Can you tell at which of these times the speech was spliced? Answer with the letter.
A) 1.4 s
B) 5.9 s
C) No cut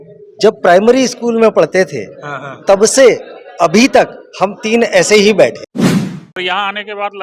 B